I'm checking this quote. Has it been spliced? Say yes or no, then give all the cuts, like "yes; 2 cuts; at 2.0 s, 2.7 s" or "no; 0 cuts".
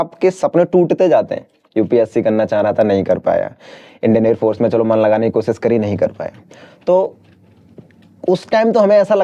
no; 0 cuts